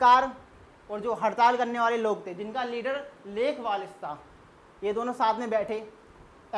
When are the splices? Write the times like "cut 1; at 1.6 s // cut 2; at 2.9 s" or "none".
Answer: none